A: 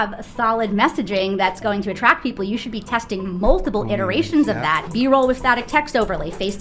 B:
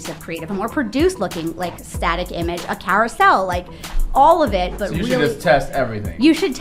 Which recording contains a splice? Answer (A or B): A